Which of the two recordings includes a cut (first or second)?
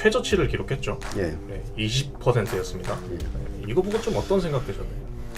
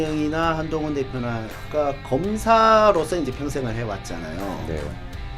second